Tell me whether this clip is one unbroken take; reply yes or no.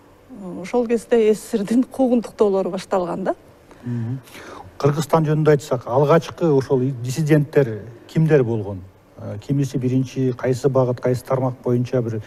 yes